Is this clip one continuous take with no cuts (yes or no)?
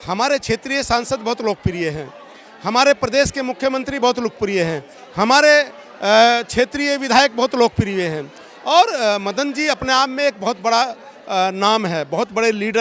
yes